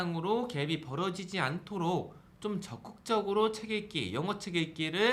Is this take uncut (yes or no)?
yes